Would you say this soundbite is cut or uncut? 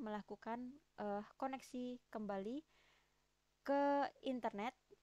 uncut